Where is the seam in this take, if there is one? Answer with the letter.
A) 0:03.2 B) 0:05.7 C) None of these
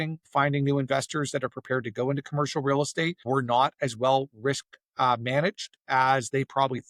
A